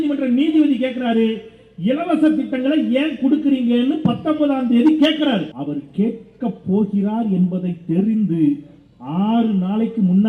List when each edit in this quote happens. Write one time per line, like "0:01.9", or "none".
0:05.5